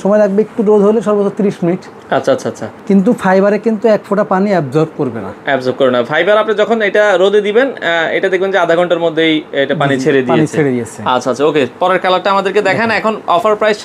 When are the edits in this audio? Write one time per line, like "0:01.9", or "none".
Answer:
none